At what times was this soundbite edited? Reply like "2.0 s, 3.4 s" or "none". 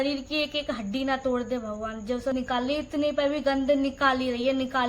2.3 s